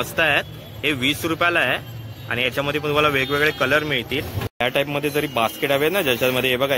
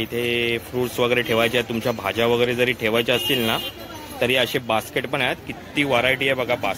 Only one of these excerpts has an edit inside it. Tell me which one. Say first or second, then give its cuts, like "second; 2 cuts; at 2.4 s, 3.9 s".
first; 1 cut; at 4.3 s